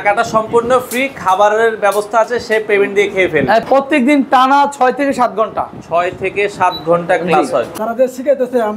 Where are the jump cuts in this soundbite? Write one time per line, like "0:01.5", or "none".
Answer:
0:03.6
0:07.7